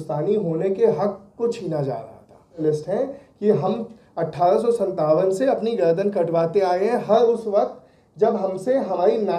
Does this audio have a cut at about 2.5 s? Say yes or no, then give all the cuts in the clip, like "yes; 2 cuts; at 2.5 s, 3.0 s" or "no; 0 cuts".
yes; 1 cut; at 2.5 s